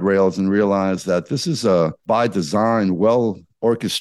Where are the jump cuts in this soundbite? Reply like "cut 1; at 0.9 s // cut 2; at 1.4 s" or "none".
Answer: cut 1; at 2.0 s